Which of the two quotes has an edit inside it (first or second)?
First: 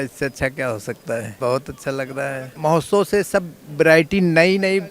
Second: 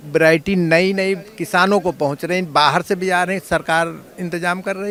first